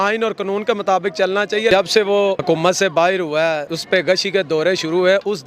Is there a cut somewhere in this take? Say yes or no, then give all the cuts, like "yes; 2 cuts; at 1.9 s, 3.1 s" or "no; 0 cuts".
yes; 3 cuts; at 1.7 s, 2.4 s, 3.7 s